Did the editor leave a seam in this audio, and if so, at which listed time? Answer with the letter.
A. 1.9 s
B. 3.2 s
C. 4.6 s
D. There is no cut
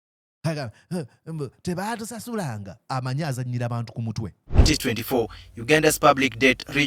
C